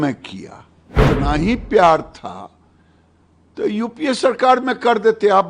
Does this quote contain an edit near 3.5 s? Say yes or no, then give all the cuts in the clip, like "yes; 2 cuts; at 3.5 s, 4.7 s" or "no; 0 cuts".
no; 1 cut; at 1.0 s